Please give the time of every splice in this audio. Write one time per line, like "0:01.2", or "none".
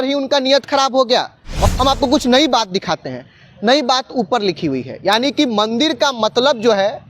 0:01.7